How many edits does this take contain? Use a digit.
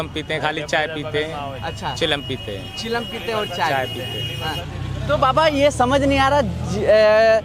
0